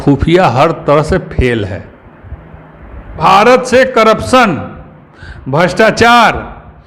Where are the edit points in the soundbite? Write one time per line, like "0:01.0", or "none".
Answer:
0:03.1